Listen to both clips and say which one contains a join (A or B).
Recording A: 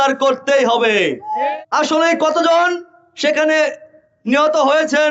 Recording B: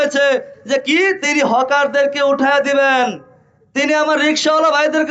A